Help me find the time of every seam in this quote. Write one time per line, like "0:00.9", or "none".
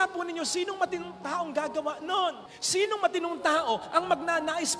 none

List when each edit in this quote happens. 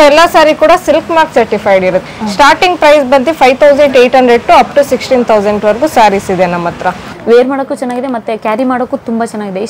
0:02.0
0:07.0

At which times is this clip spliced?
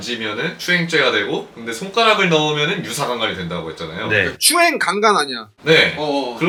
none

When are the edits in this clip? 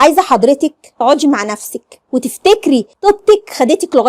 0:02.9

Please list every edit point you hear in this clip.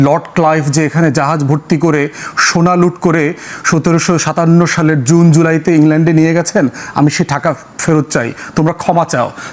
none

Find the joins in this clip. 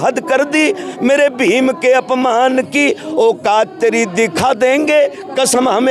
none

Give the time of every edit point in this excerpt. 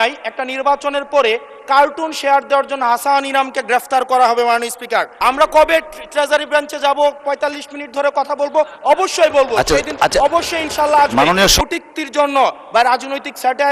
0:05.2
0:11.5

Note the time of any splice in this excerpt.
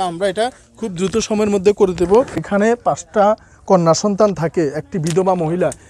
0:02.4

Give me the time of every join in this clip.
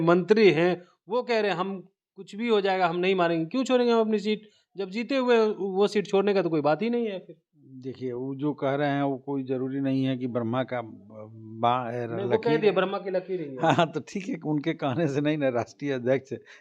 none

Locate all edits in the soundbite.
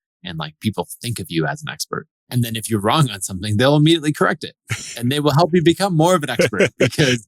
0:02.2

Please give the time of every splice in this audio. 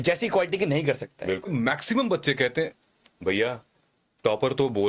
0:01.5

